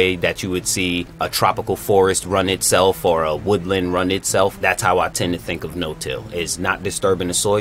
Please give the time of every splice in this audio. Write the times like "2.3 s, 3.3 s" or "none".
1.2 s, 4.6 s